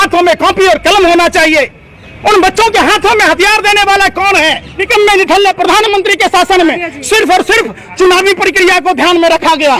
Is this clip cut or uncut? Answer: cut